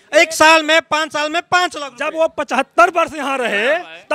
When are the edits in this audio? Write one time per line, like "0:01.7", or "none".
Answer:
none